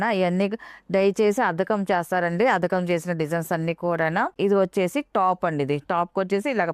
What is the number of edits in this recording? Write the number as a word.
one